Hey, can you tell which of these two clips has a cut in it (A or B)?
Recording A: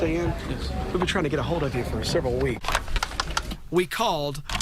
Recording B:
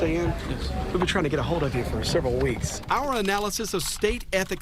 A